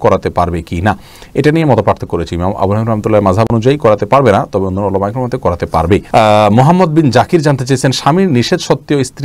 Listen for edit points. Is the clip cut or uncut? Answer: uncut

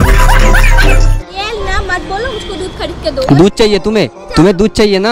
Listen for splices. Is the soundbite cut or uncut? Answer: cut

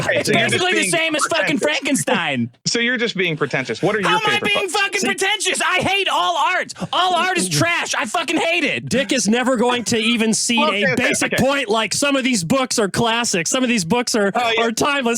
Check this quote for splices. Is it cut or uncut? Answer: cut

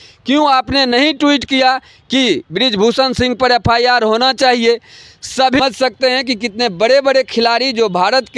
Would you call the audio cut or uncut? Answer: cut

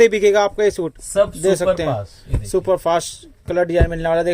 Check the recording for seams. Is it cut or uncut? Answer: cut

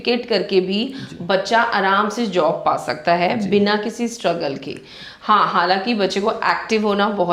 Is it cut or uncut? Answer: uncut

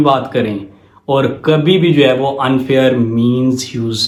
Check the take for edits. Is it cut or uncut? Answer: uncut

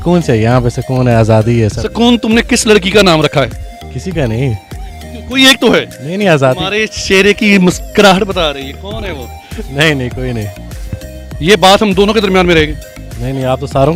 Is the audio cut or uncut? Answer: uncut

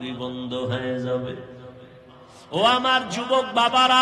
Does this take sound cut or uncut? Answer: cut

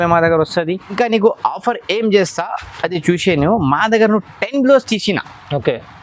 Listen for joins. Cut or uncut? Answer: cut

